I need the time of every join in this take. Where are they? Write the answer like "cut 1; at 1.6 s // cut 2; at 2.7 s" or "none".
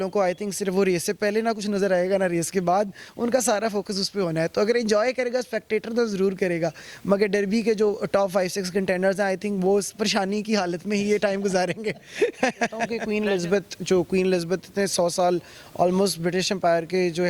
cut 1; at 13.0 s